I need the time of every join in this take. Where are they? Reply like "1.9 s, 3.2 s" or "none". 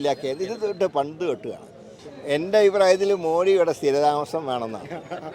2.0 s